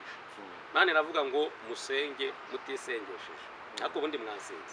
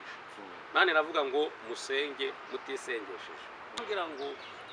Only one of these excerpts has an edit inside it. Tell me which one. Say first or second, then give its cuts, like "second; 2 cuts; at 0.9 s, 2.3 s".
second; 1 cut; at 3.8 s